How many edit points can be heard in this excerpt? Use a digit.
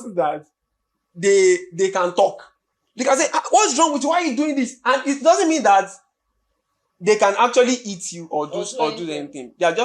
0